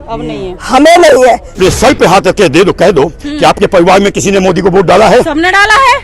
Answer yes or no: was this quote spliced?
yes